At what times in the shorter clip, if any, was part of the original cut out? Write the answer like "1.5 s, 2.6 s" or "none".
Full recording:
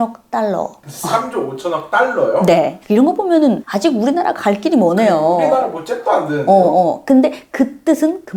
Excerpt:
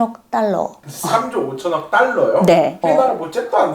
2.8 s